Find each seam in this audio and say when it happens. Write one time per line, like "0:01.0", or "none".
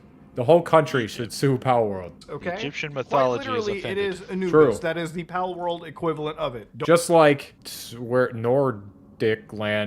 none